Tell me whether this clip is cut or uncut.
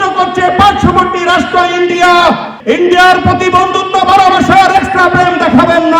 cut